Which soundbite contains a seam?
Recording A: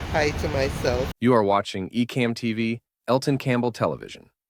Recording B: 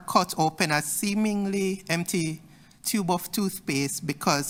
A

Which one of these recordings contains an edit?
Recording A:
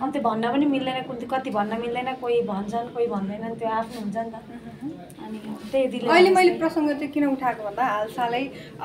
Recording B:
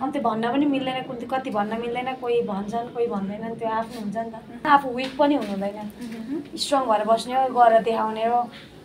B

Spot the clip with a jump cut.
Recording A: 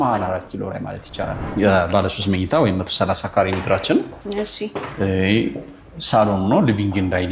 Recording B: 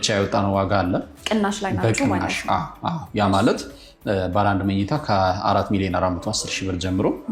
A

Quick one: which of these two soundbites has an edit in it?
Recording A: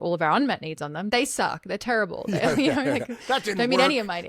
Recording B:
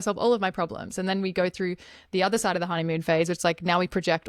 A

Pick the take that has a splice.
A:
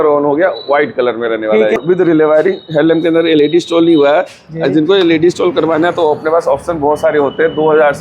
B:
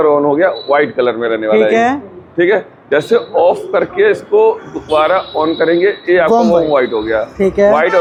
A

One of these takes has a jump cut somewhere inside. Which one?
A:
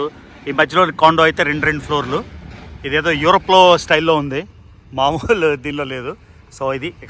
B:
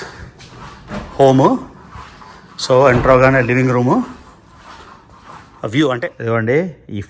B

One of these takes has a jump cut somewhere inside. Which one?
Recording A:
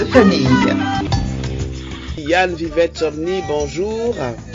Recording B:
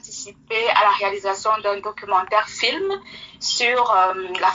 A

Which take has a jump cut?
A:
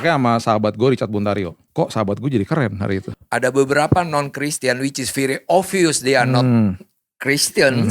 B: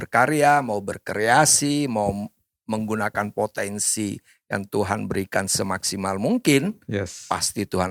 A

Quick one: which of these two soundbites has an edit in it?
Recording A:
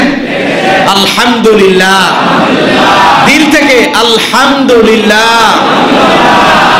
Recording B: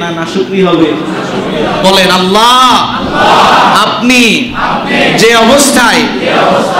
B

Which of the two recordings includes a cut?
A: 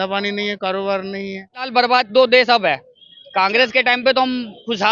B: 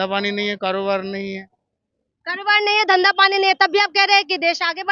A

